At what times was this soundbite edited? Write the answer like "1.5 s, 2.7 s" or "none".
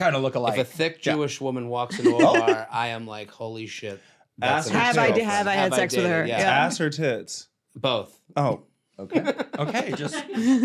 none

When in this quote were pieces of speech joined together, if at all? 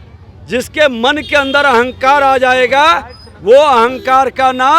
none

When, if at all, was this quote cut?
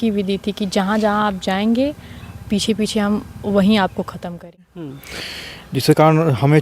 4.6 s

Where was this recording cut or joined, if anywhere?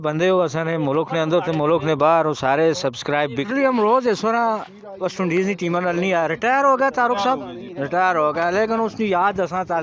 3.4 s

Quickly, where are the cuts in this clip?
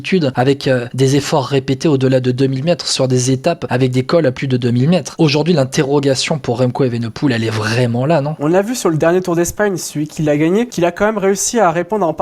0.7 s, 3.6 s, 5.1 s, 8.3 s, 10.7 s

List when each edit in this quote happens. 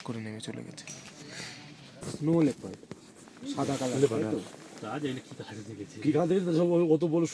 2.0 s

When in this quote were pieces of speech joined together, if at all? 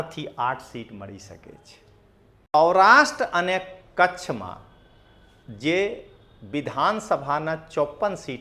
2.5 s

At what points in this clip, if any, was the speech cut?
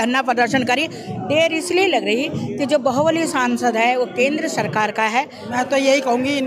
1.0 s, 5.4 s

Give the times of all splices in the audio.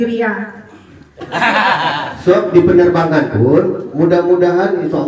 1.1 s

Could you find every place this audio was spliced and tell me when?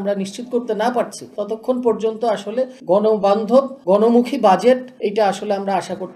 1.3 s, 2.8 s, 3.8 s, 4.9 s

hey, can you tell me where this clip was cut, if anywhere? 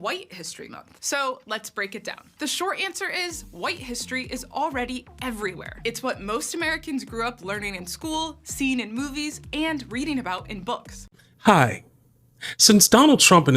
10.9 s

